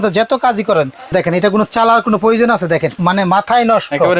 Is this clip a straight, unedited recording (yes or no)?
no